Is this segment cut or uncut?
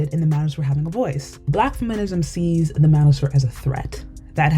cut